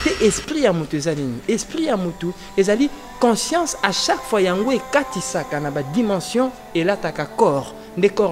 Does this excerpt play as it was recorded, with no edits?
yes; 0 cuts

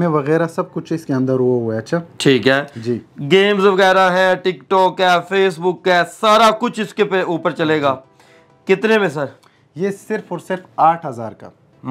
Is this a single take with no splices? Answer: yes; 0 cuts

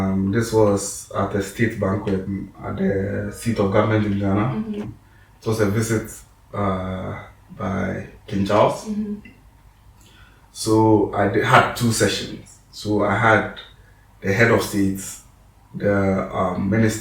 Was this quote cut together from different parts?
yes; 2 cuts; at 2.3 s, 4.8 s

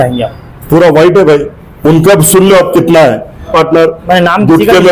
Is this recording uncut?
no; 1 cut; at 3.5 s

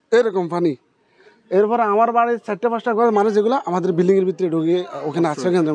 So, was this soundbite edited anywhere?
no; 0 cuts

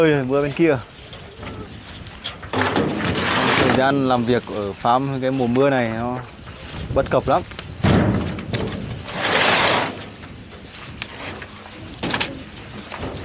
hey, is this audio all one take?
yes; 0 cuts

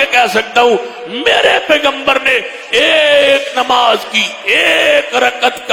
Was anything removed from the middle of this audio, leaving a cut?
no; 0 cuts

